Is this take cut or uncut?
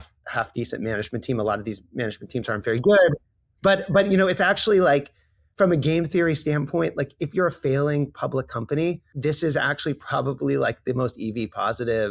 cut